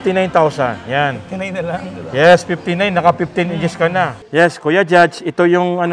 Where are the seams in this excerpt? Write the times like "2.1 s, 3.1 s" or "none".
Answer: 4.2 s

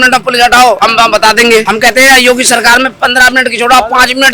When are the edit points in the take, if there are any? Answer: 0.8 s, 1.7 s

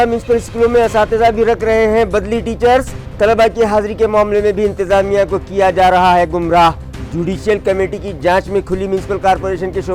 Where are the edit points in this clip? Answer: none

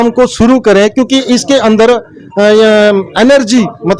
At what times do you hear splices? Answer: none

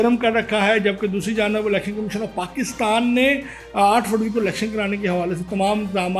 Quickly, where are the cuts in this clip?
none

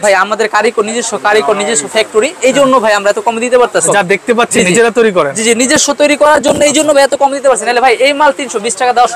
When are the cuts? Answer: 3.8 s

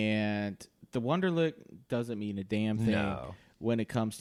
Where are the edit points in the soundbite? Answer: none

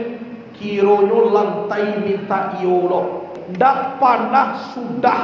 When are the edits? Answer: 3.4 s

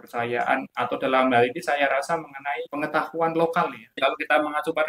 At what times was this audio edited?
2.7 s, 4.0 s

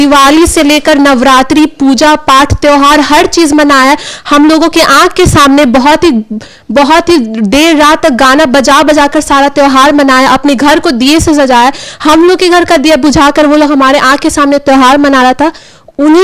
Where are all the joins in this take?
none

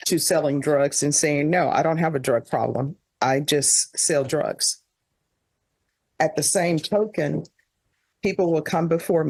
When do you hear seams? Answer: none

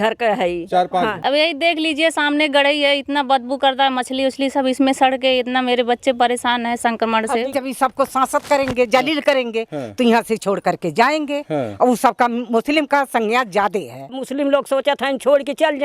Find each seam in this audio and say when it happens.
1.2 s, 7.5 s, 14.2 s

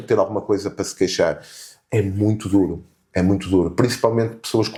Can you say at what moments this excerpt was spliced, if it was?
none

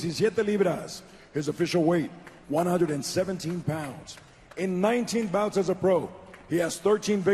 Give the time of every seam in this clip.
2.0 s

